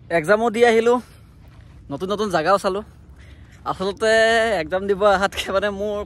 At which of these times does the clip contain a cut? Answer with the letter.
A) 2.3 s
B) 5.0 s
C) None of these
C